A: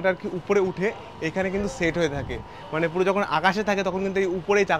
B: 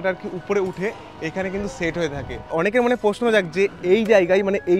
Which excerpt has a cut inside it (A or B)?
B